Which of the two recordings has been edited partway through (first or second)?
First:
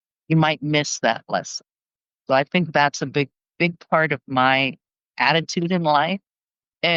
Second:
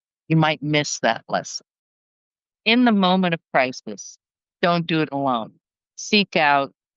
second